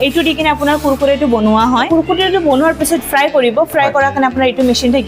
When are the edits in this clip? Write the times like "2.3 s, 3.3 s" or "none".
1.9 s, 3.0 s